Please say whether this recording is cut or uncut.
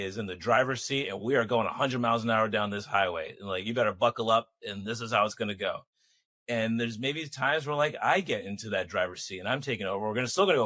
uncut